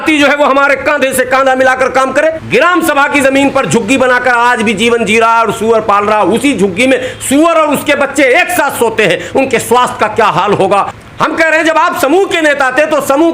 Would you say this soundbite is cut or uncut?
cut